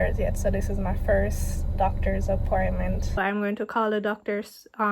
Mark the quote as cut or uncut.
cut